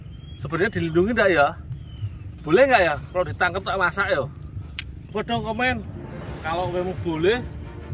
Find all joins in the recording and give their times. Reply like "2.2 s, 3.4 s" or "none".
5.1 s